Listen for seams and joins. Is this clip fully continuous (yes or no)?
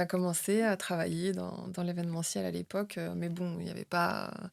yes